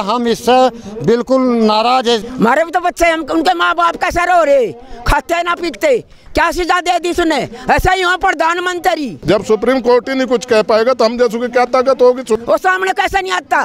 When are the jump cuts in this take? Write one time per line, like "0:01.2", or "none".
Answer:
0:02.2
0:09.1
0:12.4